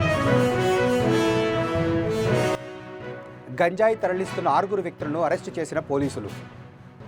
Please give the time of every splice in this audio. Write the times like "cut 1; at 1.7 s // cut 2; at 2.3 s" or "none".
cut 1; at 2.6 s